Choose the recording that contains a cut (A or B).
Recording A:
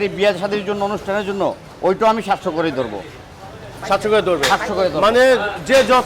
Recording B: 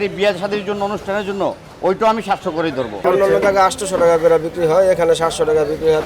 B